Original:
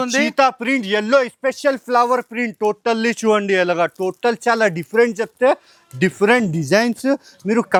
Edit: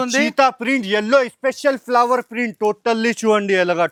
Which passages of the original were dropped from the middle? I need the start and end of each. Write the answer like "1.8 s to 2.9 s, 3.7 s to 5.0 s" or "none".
none